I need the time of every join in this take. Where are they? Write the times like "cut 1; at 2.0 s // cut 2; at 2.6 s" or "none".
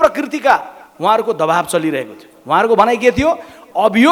none